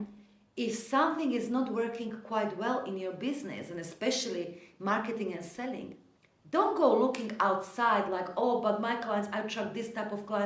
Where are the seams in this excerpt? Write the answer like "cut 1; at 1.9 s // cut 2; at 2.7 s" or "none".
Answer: none